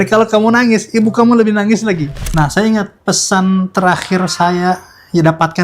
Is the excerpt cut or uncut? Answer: cut